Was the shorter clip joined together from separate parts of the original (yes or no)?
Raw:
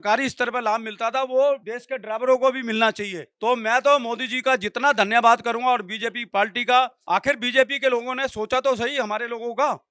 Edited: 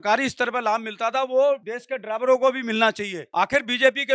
yes